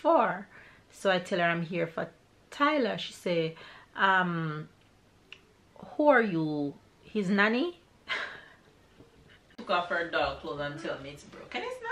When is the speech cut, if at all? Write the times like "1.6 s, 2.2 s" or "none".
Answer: 9.4 s